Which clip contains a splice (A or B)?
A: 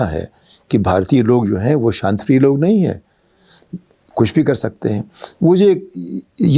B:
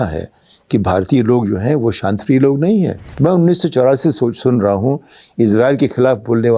B